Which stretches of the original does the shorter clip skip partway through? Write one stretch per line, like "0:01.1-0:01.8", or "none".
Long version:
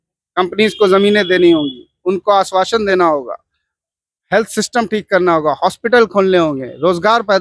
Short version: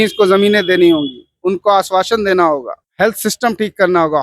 0:03.4-0:04.1